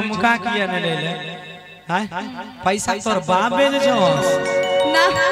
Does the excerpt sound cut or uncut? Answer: uncut